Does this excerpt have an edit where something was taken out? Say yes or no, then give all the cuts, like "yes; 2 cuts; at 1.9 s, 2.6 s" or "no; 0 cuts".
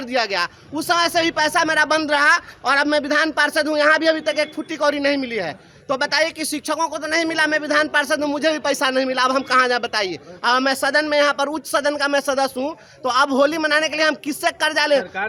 no; 0 cuts